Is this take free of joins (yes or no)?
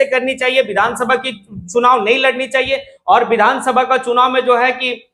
yes